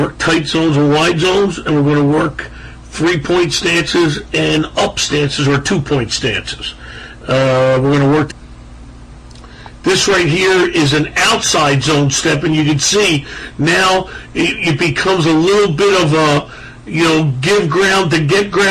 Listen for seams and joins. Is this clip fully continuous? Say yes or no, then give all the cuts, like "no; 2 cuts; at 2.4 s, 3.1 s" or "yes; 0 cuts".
yes; 0 cuts